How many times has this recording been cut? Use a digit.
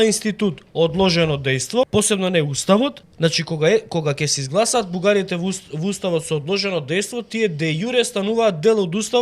2